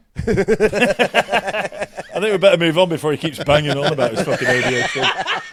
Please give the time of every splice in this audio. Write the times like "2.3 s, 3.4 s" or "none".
none